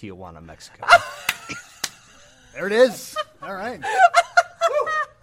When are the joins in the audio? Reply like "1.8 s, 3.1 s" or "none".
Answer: none